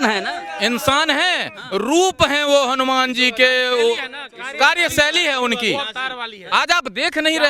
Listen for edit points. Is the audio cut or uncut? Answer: uncut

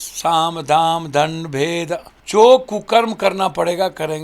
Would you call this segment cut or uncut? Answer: cut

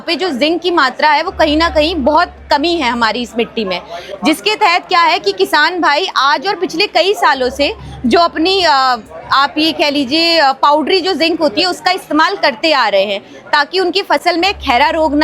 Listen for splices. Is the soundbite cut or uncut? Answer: uncut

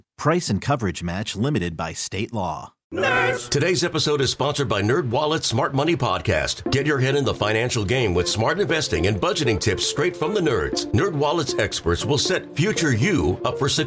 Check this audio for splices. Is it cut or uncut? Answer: cut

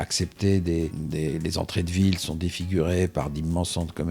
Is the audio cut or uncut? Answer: cut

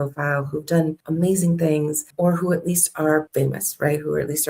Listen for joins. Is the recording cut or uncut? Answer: cut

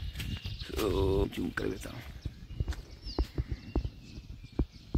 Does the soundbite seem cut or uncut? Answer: cut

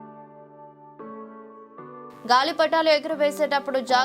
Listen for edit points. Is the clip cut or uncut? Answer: cut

